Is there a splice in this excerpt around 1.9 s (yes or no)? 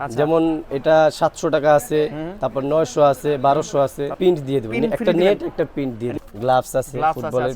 no